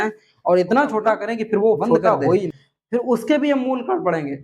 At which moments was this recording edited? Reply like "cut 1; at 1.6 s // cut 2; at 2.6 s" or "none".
cut 1; at 2.6 s